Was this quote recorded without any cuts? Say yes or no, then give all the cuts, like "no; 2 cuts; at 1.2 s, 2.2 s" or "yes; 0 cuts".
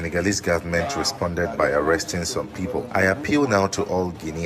no; 1 cut; at 2.9 s